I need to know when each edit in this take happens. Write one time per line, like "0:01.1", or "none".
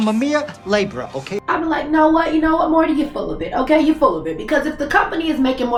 none